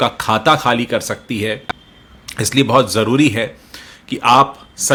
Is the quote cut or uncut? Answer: uncut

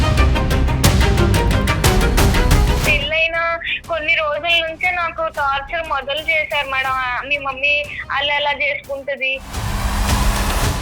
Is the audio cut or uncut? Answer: cut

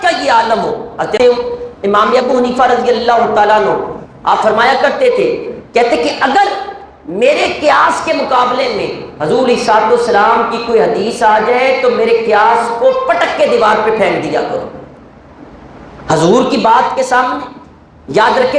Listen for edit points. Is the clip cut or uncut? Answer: cut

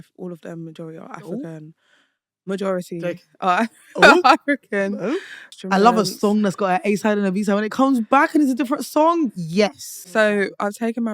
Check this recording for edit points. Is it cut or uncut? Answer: cut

